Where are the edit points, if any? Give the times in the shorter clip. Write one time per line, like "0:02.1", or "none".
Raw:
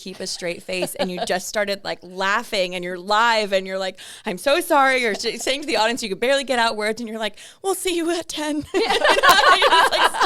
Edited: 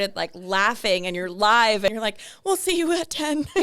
0:01.9